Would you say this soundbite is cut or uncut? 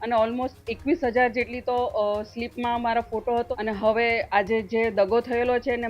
cut